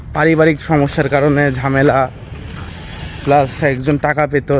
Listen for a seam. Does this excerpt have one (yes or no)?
no